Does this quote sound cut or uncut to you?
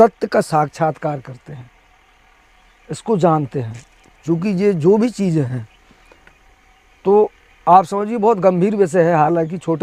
uncut